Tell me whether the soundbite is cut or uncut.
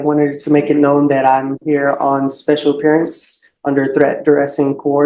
uncut